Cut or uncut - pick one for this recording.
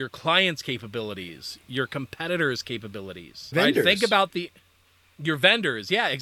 uncut